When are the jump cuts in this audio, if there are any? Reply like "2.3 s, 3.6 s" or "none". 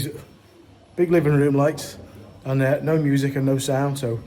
none